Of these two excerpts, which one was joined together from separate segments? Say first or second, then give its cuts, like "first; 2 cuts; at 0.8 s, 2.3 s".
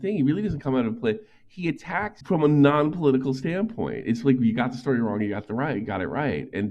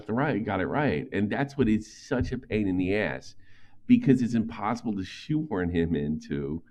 first; 1 cut; at 2.2 s